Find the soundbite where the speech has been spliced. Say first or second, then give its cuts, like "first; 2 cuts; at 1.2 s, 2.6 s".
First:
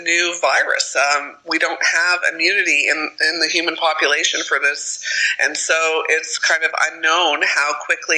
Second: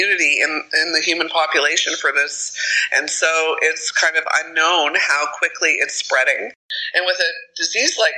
second; 1 cut; at 6.7 s